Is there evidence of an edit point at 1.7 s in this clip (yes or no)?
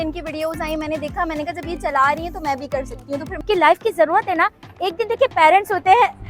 no